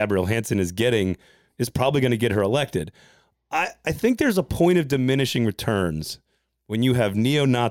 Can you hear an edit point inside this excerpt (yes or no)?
no